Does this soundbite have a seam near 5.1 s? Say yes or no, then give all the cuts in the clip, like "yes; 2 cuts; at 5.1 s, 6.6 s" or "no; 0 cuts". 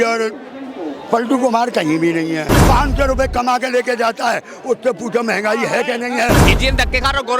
no; 2 cuts; at 2.5 s, 6.4 s